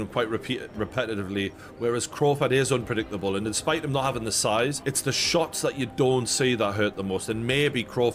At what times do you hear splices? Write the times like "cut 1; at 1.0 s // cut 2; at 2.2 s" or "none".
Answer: none